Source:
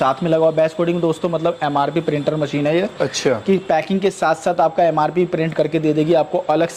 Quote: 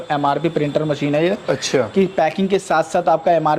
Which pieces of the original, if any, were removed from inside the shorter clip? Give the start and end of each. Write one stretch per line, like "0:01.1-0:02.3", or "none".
none